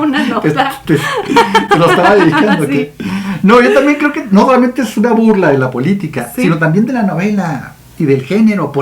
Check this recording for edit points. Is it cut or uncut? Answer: uncut